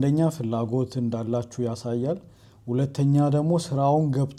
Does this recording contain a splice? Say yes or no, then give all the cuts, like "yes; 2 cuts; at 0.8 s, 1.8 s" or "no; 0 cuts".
no; 0 cuts